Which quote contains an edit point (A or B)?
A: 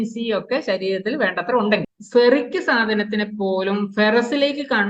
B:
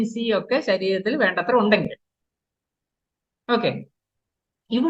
A